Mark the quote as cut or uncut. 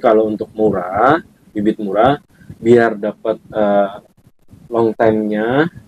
uncut